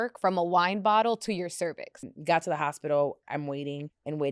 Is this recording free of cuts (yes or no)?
no